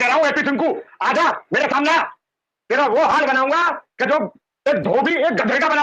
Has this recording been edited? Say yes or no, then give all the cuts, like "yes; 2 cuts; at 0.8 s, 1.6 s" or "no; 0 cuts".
no; 0 cuts